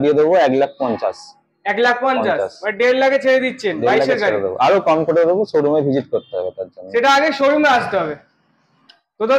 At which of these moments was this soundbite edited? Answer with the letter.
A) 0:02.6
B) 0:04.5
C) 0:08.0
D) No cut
D